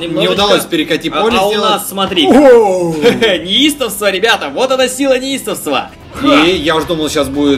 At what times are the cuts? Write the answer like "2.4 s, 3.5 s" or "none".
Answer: 5.9 s